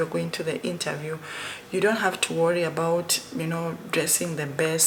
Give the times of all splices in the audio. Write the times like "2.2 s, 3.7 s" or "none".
none